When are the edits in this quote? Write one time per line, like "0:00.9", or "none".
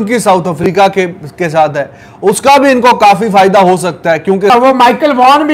0:04.5